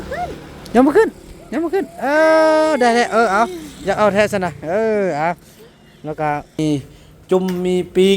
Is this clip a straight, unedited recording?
no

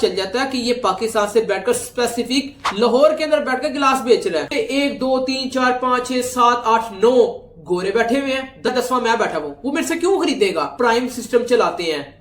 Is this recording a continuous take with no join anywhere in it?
no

